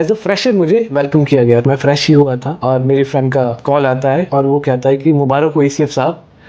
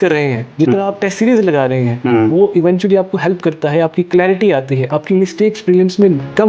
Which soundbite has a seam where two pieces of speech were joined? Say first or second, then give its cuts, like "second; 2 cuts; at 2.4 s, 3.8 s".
first; 3 cuts; at 1.6 s, 2.5 s, 4.0 s